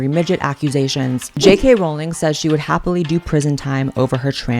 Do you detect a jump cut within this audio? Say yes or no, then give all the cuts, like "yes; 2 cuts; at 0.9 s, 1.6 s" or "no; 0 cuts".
yes; 1 cut; at 1.2 s